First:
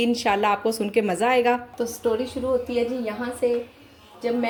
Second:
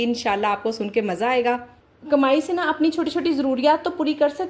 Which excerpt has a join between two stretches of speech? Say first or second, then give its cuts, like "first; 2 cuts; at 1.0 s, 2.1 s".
second; 1 cut; at 2.0 s